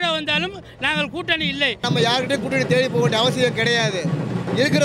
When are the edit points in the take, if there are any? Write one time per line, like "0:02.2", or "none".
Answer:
0:01.8